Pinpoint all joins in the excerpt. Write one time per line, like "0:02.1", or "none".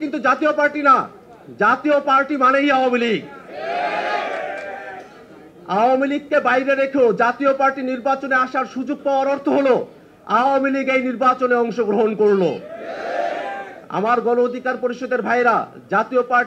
none